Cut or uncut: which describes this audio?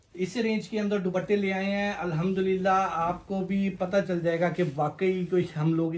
uncut